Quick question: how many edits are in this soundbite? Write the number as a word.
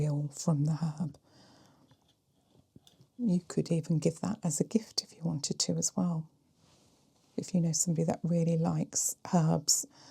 one